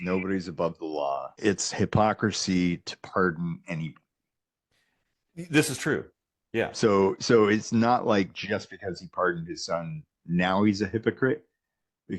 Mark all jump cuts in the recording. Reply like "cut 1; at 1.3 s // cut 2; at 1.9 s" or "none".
cut 1; at 1.3 s